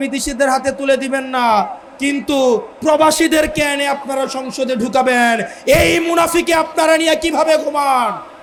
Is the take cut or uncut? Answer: uncut